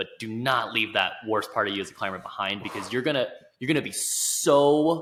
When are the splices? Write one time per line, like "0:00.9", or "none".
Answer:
none